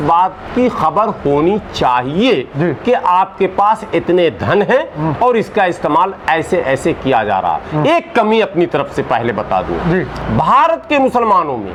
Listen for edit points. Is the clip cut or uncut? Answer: uncut